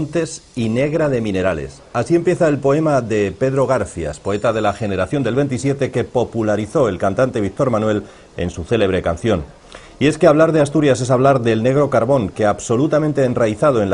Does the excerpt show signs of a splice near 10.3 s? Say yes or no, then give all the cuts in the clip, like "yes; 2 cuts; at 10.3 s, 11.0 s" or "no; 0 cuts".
no; 0 cuts